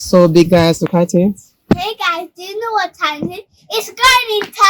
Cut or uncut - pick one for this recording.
cut